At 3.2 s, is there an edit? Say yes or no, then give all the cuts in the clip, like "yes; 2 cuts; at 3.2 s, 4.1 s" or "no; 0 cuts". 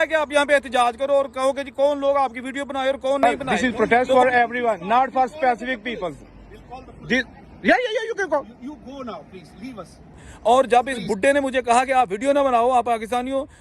yes; 2 cuts; at 3.2 s, 10.2 s